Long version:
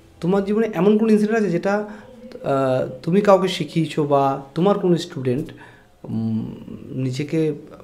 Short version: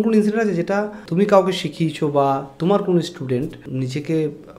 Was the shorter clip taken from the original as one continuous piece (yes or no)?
no